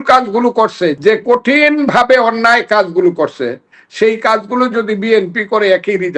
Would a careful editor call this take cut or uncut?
cut